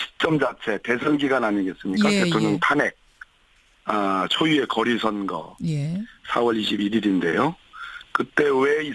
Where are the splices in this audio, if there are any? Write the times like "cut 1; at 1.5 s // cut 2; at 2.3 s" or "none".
cut 1; at 6.0 s